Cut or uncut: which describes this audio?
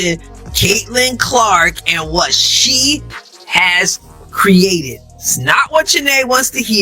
cut